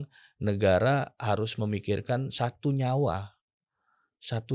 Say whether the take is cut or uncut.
uncut